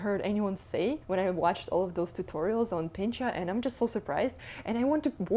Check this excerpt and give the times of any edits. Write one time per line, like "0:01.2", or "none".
0:01.0